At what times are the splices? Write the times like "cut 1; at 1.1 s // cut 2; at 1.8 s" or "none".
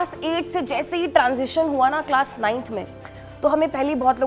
none